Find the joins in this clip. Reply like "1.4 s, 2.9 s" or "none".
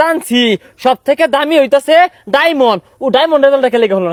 none